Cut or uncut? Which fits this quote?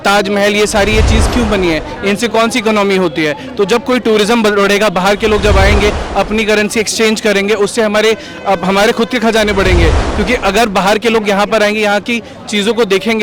uncut